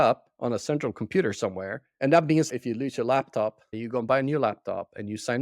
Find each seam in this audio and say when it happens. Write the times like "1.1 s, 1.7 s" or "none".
1.8 s, 2.5 s, 3.7 s